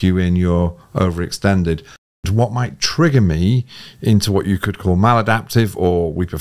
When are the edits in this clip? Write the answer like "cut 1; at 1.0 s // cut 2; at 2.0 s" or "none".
cut 1; at 2.2 s